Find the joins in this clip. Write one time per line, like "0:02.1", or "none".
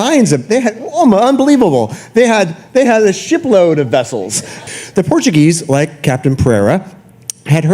0:04.6